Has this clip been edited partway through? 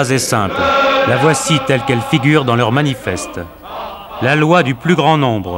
no; 0 cuts

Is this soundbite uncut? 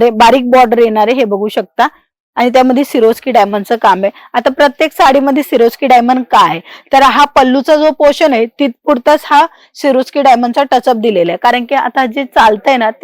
yes; 0 cuts

